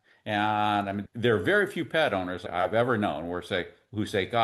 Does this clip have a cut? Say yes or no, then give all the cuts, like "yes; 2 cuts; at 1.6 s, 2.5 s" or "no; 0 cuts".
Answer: yes; 2 cuts; at 1.0 s, 2.4 s